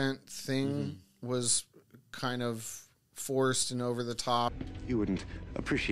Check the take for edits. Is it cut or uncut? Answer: cut